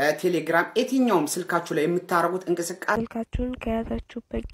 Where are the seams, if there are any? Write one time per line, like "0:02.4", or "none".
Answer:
0:03.0